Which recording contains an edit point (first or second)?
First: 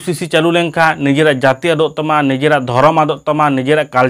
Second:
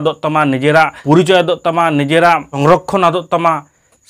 second